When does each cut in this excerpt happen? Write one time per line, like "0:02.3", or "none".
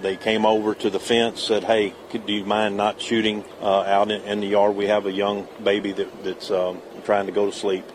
0:03.5
0:06.9